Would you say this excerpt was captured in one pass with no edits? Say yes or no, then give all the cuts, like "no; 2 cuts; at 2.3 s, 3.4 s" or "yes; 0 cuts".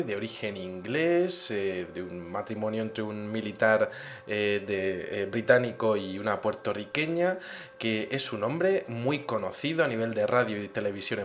yes; 0 cuts